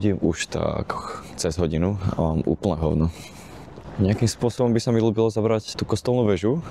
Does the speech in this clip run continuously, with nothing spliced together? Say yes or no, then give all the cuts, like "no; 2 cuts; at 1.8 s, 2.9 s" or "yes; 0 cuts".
yes; 0 cuts